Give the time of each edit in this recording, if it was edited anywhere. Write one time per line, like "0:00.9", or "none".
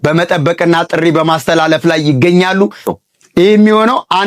0:02.8